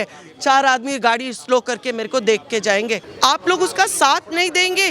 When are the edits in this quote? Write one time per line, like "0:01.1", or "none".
0:03.1